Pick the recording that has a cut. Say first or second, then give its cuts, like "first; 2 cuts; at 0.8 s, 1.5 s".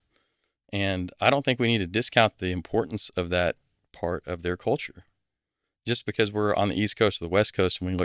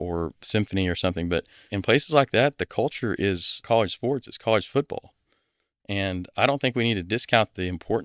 second; 2 cuts; at 1.7 s, 3.5 s